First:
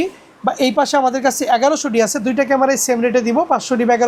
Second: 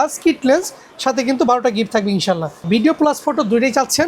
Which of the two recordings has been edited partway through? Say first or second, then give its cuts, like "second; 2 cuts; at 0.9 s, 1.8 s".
second; 1 cut; at 2.6 s